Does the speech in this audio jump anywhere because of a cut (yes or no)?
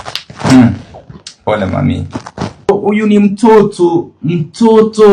yes